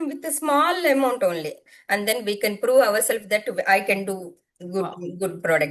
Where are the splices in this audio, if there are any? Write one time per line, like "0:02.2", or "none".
0:01.7